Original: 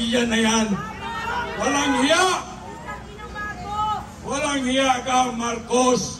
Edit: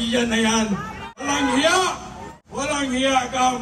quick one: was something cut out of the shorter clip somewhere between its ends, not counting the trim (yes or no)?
yes